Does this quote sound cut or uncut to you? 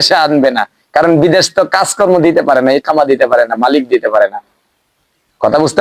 uncut